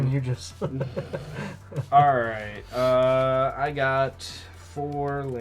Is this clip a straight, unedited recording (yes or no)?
yes